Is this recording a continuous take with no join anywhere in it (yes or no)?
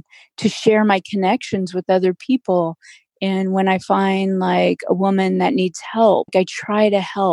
yes